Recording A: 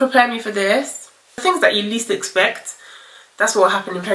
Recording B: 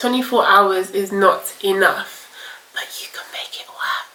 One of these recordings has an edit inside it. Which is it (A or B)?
A